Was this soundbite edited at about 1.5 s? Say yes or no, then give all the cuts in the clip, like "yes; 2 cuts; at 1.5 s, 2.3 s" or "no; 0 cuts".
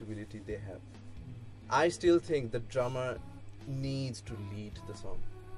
yes; 1 cut; at 1.5 s